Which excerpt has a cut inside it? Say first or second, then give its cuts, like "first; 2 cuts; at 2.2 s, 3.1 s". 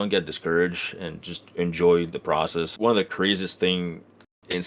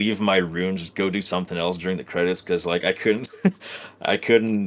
first; 1 cut; at 2.7 s